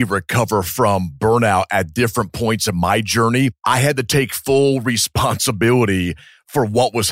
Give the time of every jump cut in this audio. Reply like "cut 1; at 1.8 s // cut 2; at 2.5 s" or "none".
cut 1; at 3.6 s